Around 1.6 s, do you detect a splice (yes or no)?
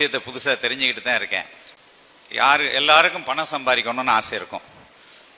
yes